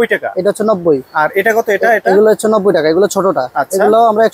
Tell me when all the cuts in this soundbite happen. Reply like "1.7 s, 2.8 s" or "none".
none

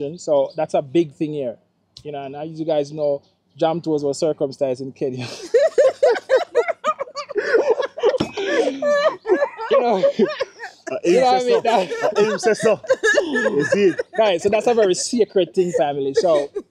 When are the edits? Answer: none

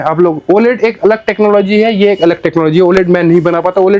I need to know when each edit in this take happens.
none

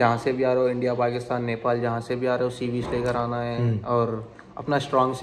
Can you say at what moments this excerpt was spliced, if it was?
none

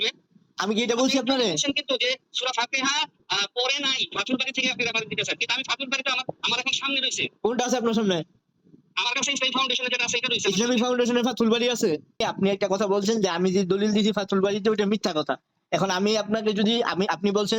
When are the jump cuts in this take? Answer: 12.2 s

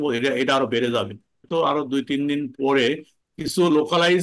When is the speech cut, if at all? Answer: 1.4 s

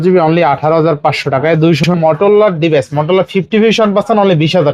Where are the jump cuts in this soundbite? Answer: 1.9 s

